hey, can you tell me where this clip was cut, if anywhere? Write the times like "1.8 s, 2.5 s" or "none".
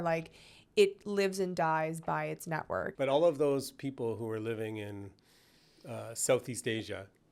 2.9 s